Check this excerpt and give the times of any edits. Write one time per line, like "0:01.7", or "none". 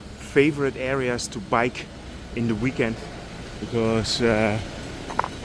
none